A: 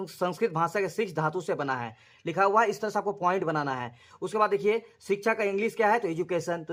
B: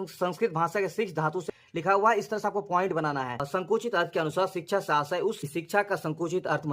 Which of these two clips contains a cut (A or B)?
B